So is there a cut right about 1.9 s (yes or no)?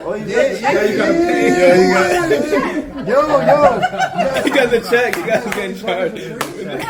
no